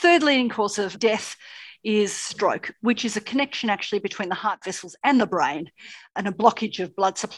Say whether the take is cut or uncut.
cut